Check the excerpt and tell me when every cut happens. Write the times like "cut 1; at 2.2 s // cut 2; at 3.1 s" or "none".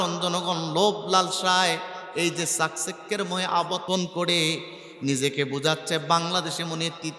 cut 1; at 3.8 s